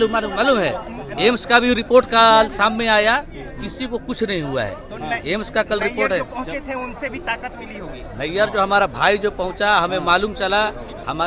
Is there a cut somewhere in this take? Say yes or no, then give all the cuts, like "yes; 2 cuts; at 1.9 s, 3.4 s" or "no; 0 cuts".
no; 0 cuts